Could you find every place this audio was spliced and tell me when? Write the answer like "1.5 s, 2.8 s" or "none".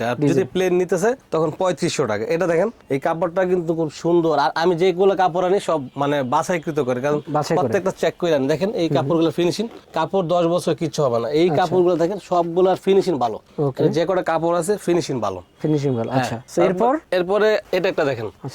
none